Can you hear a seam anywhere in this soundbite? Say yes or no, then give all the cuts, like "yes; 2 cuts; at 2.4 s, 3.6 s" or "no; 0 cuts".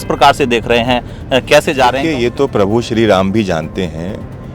yes; 1 cut; at 2.0 s